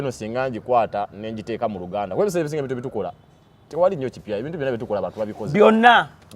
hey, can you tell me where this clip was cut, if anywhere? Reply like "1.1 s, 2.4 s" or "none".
none